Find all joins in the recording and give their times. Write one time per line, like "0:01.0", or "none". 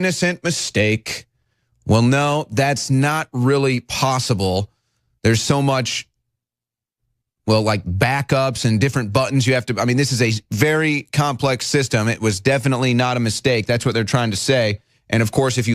0:04.1